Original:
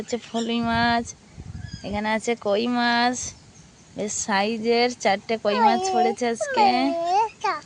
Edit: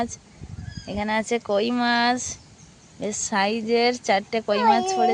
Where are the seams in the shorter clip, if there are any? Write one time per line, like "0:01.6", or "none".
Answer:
none